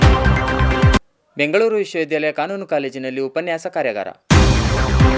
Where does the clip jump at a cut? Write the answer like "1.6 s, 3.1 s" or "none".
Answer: none